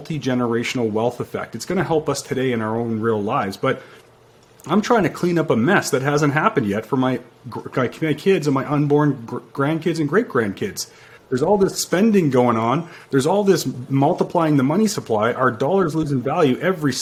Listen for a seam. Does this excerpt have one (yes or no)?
no